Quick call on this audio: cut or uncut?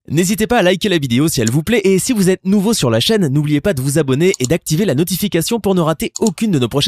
cut